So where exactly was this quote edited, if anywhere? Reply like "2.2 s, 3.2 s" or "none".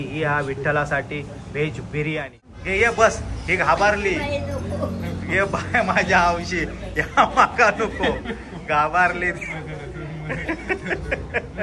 2.6 s